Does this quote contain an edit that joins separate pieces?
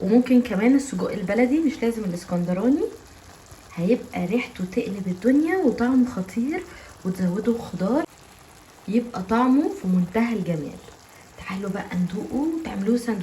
yes; 1 cut; at 8.0 s

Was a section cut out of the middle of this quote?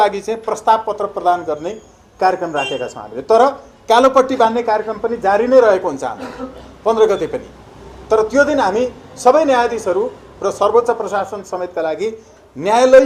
no; 0 cuts

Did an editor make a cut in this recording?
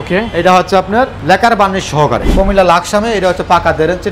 yes; 2 cuts; at 1.2 s, 2.3 s

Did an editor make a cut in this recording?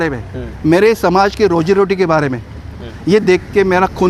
no; 0 cuts

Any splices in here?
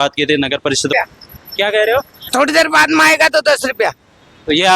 yes; 1 cut; at 0.9 s

